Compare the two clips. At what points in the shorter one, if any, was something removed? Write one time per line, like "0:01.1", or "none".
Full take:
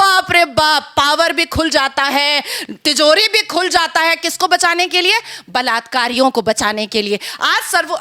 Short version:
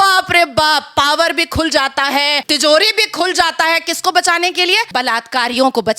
0:02.4
0:04.9